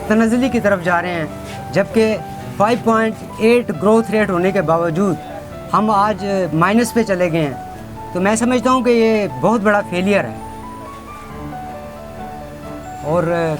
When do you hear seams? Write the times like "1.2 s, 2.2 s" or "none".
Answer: none